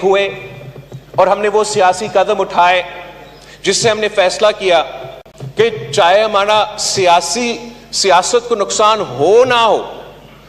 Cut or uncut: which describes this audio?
uncut